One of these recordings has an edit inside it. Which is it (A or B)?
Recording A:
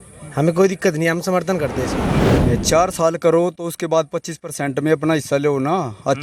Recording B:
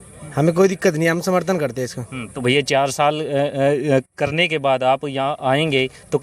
A